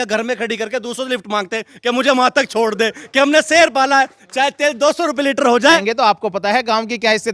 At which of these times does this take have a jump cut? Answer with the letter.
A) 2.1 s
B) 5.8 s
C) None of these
B